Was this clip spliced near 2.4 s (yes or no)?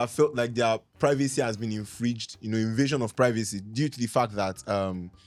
no